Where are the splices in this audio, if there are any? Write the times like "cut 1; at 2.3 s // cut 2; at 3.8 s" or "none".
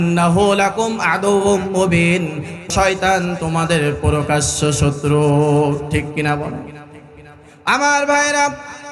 cut 1; at 2.7 s

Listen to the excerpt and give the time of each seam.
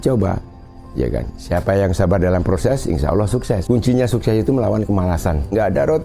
cut 1; at 3.6 s

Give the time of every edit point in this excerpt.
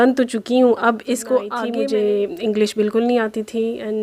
cut 1; at 1.6 s

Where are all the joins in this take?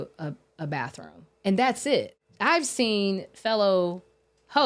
cut 1; at 2.1 s

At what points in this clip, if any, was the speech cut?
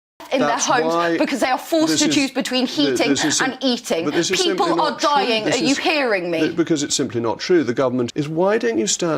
cut 1; at 8.1 s

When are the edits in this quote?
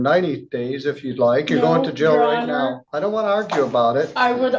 cut 1; at 3.2 s

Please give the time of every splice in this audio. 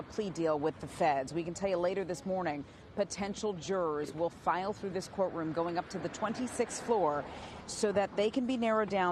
cut 1; at 1.0 s // cut 2; at 7.2 s

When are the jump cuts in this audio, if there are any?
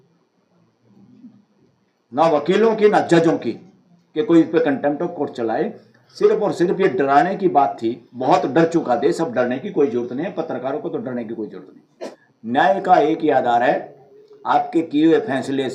cut 1; at 12.2 s

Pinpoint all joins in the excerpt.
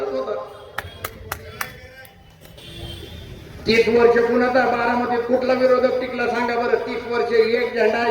cut 1; at 2.6 s

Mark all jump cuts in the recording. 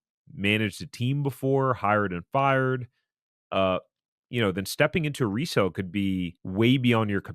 cut 1; at 6.4 s

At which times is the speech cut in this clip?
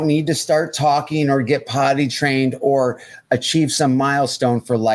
none

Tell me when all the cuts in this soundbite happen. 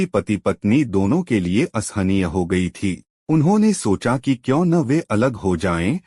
cut 1; at 3.1 s

